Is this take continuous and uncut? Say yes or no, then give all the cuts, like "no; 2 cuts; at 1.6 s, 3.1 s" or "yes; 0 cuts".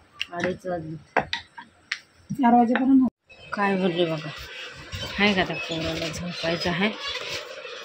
no; 1 cut; at 3.1 s